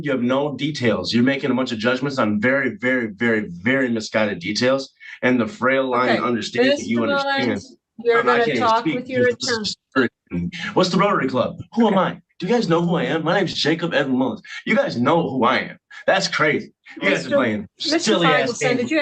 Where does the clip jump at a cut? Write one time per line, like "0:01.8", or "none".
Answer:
none